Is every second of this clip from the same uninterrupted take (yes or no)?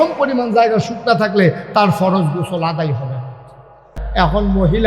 no